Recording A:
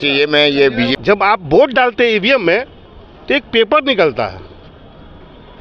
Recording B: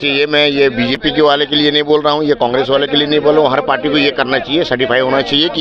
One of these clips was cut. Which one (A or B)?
A